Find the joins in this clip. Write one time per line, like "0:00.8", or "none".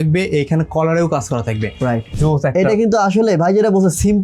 0:02.1